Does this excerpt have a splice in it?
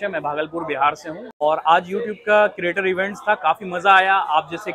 yes; 1 cut; at 1.4 s

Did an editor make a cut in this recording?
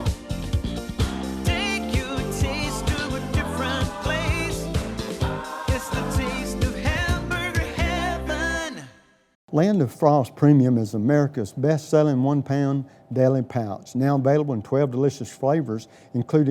yes; 1 cut; at 9.4 s

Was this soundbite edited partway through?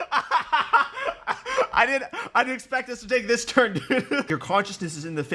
yes; 1 cut; at 4.3 s

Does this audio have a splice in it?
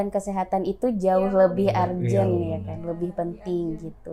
no; 0 cuts

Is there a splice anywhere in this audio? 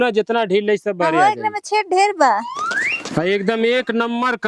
yes; 1 cut; at 2.5 s

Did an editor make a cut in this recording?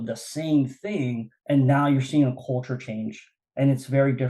yes; 1 cut; at 1.3 s

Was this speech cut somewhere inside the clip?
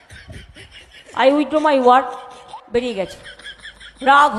no; 0 cuts

